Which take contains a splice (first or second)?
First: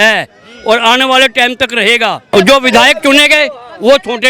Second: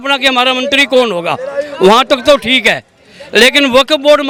first